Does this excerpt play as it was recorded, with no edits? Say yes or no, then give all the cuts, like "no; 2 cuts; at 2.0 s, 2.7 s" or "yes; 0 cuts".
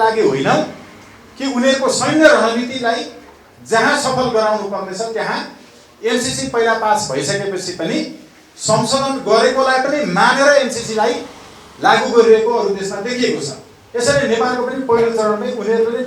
yes; 0 cuts